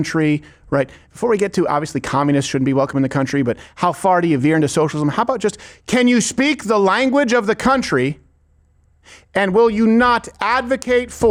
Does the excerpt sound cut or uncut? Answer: uncut